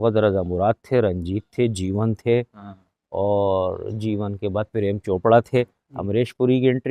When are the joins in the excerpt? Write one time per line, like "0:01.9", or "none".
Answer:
none

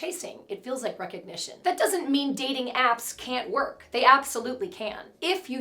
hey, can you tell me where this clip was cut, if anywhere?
0:01.6

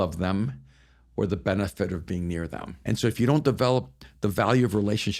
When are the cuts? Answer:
0:02.7

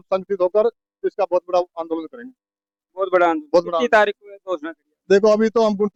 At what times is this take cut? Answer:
none

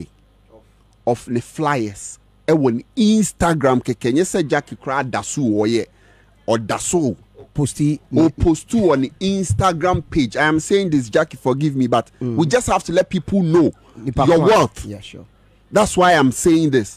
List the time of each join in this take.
none

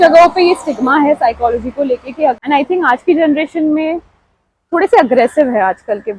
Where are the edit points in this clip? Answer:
0:02.4

